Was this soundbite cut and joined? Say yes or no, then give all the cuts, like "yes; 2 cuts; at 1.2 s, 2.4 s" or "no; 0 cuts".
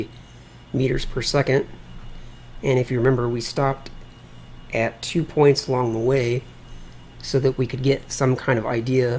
no; 0 cuts